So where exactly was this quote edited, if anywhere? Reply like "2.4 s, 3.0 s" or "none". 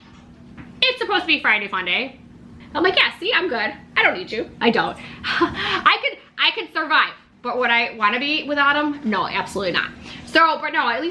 2.6 s